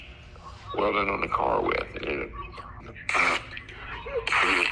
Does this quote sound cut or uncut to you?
cut